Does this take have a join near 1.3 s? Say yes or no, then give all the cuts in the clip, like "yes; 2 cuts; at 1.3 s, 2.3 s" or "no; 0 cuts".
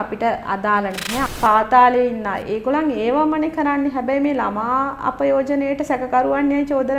yes; 1 cut; at 1.3 s